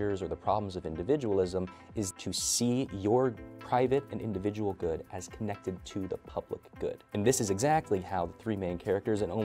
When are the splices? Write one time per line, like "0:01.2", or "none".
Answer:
0:02.1
0:07.2